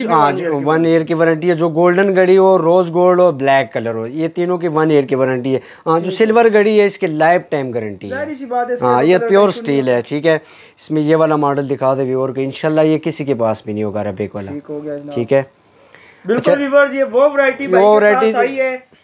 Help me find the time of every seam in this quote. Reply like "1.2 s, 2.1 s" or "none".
none